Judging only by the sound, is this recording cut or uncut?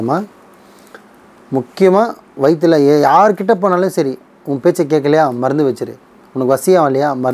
uncut